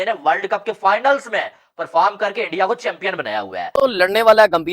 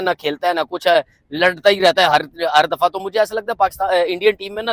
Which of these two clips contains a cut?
first; 1 cut; at 3.8 s

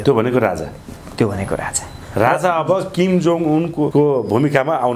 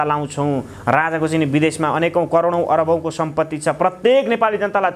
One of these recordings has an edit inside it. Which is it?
first; 1 cut; at 3.9 s

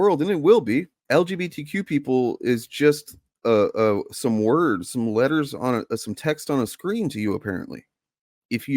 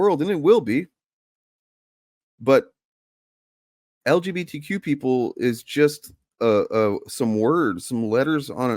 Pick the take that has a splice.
first; 1 cut; at 1.0 s

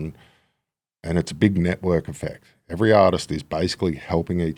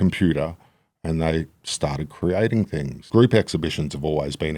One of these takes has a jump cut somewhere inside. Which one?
second; 1 cut; at 3.0 s

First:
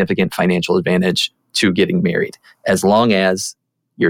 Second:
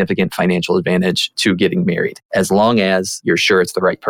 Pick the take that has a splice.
second; 3 cuts; at 1.3 s, 2.2 s, 3.1 s

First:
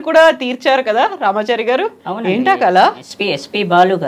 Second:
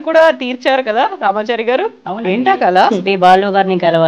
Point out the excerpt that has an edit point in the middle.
second; 1 cut; at 3.0 s

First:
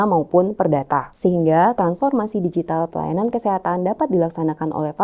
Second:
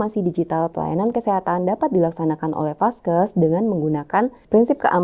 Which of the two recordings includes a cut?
first; 1 cut; at 1.1 s

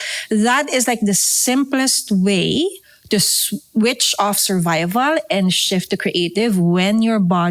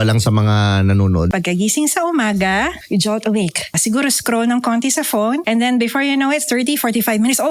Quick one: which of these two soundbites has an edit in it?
second; 4 cuts; at 1.3 s, 2.8 s, 3.8 s, 5.4 s

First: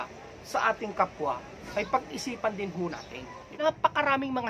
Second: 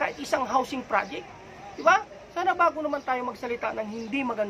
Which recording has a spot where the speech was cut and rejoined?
first; 1 cut; at 3.4 s

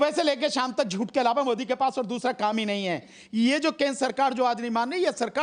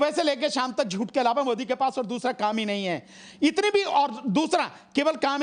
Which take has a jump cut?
first; 1 cut; at 3.2 s

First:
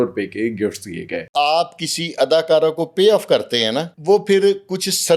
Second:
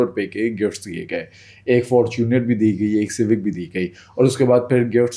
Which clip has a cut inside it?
first; 2 cuts; at 1.3 s, 3.9 s

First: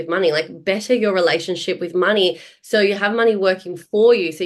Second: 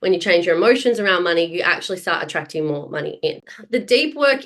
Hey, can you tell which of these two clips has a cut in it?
second; 1 cut; at 3.5 s

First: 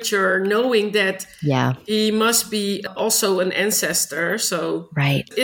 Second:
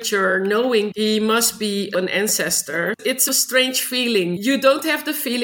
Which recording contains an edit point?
second; 4 cuts; at 0.9 s, 1.9 s, 3.2 s, 4.4 s

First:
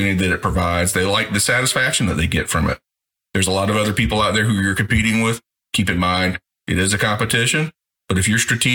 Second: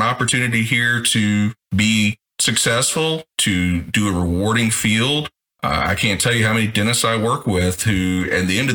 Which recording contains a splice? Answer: first; 1 cut; at 3.0 s

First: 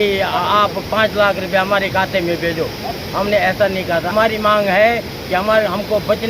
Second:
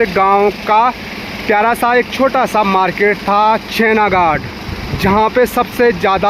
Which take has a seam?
first; 1 cut; at 4.1 s

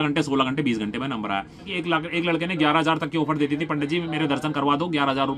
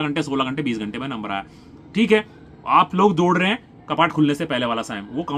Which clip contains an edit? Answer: first; 1 cut; at 1.7 s

